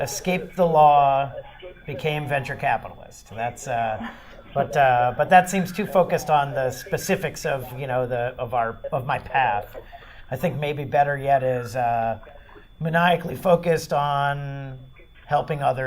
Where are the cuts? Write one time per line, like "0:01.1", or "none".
0:07.3